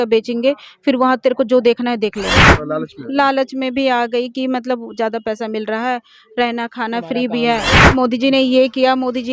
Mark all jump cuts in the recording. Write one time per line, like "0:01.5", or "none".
0:02.5
0:07.9